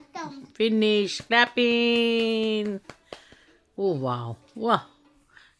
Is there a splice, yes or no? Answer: no